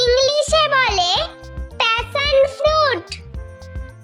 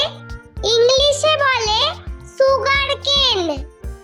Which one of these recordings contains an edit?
first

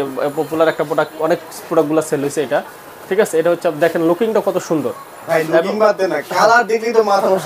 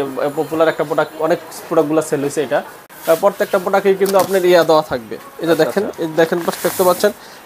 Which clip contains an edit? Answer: second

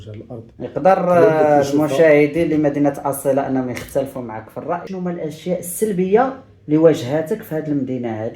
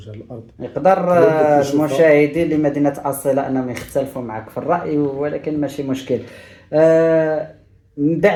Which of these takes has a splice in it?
first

